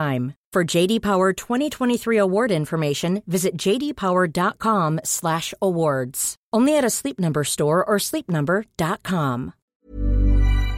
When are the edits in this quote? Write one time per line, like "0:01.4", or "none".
0:09.6